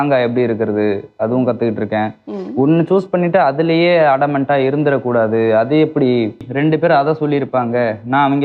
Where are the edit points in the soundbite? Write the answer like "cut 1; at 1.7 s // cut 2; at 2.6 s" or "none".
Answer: cut 1; at 6.5 s